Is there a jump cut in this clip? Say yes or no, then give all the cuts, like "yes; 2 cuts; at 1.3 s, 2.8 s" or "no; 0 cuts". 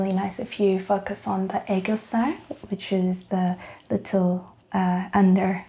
no; 0 cuts